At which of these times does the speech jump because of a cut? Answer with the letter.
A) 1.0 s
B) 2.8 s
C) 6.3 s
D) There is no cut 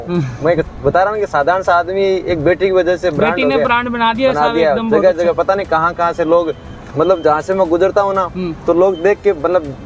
D